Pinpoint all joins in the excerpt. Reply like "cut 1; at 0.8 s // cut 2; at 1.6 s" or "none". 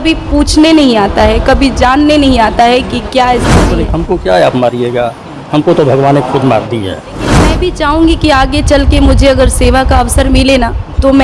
cut 1; at 3.8 s // cut 2; at 7.5 s